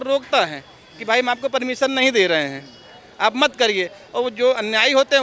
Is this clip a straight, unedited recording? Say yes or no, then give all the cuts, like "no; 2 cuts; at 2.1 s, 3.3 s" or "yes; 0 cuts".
yes; 0 cuts